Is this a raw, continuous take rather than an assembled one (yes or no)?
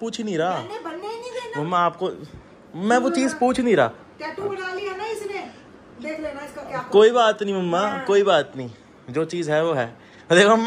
yes